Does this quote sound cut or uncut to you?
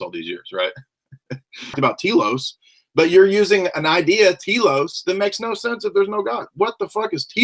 cut